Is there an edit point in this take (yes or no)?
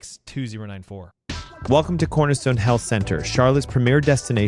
yes